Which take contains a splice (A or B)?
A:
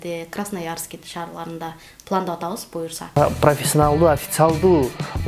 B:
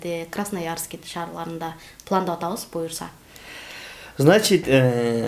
A